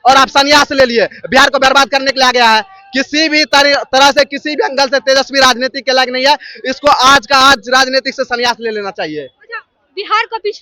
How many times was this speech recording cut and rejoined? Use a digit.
0